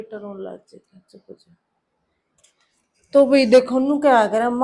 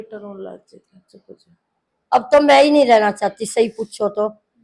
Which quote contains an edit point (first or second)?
second